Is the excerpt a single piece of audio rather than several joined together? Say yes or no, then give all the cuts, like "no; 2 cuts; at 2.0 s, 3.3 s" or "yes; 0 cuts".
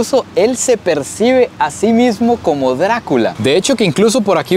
no; 1 cut; at 3.3 s